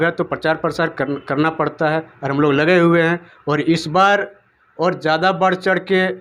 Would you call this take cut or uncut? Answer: uncut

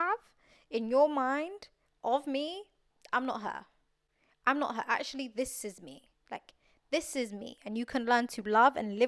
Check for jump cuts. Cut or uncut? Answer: uncut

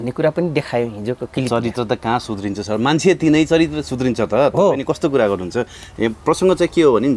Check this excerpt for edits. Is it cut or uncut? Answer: uncut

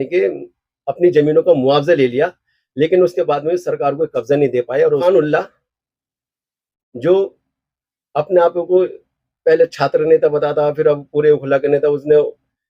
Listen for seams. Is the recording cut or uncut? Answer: cut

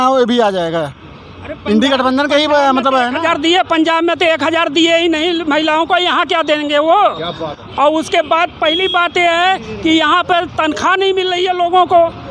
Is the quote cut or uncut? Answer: uncut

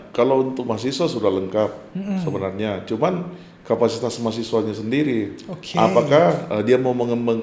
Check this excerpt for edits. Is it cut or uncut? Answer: uncut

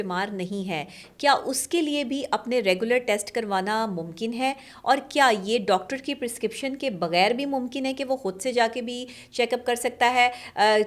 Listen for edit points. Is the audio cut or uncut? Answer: uncut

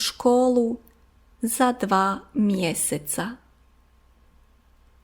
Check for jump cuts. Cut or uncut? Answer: cut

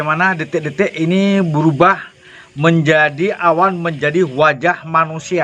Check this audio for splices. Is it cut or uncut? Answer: uncut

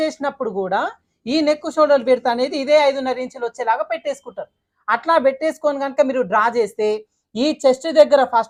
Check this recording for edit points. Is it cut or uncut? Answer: uncut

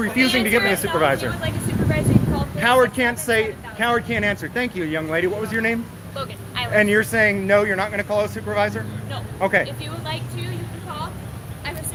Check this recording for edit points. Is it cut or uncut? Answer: uncut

